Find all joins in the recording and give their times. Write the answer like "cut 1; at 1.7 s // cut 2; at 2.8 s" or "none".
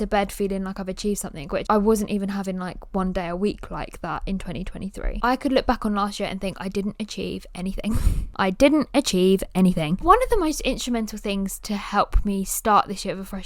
cut 1; at 1.6 s // cut 2; at 5.1 s // cut 3; at 8.2 s // cut 4; at 10.0 s